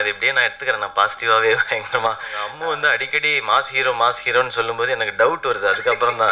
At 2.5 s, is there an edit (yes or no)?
yes